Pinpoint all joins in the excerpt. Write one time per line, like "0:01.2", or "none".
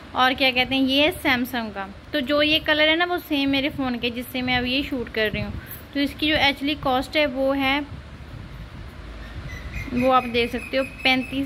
none